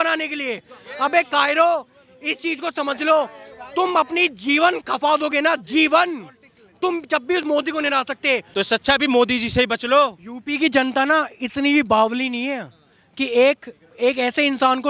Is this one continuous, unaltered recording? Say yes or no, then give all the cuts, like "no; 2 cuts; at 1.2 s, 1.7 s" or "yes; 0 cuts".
no; 1 cut; at 8.5 s